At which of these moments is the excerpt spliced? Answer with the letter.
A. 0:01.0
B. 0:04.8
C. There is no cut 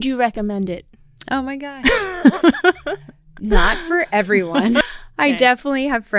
B